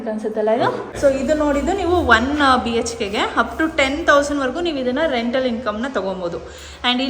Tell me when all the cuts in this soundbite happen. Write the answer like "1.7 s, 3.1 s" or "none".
0.9 s